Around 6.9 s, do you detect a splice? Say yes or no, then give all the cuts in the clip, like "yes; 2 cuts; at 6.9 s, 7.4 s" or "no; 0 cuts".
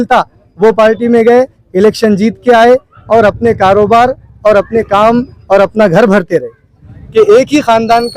yes; 1 cut; at 6.9 s